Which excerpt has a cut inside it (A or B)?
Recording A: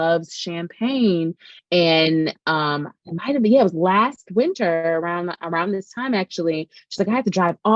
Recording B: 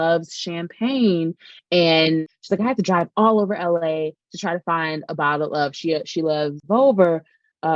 B